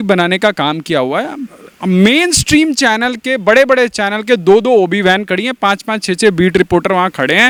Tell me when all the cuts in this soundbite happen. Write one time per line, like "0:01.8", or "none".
none